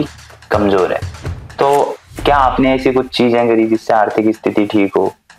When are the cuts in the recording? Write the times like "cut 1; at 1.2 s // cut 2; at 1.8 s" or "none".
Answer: none